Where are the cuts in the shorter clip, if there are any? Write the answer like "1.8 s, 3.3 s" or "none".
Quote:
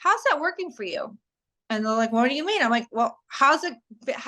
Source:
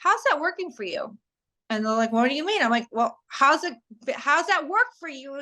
none